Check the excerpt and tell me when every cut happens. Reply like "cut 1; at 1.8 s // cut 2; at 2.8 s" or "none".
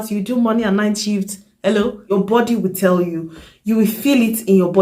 cut 1; at 2.1 s